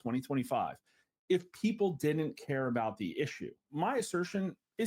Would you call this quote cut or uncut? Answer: cut